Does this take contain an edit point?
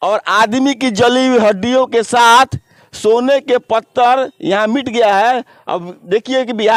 no; 0 cuts

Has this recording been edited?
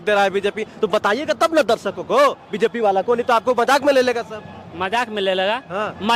no; 0 cuts

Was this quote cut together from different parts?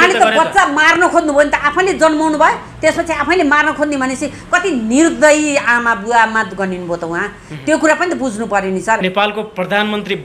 yes; 1 cut; at 9.0 s

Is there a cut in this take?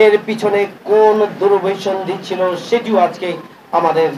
no; 0 cuts

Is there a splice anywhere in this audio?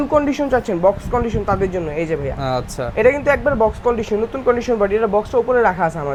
no; 0 cuts

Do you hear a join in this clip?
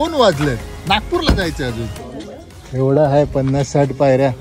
yes; 1 cut; at 2.0 s

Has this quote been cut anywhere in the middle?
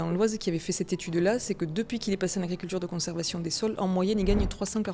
no; 0 cuts

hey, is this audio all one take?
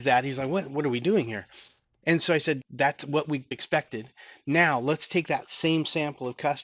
no; 2 cuts; at 2.6 s, 3.5 s

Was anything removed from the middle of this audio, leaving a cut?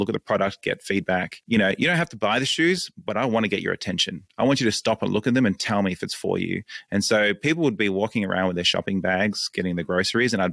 yes; 1 cut; at 1.3 s

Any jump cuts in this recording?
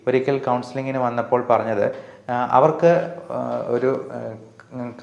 no; 0 cuts

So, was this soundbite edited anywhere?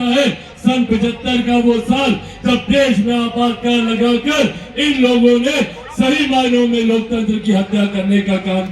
no; 0 cuts

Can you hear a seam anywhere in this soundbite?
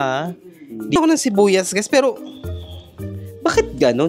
yes; 1 cut; at 1.0 s

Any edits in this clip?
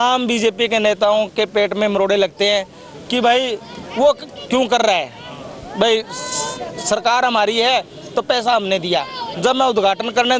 no; 0 cuts

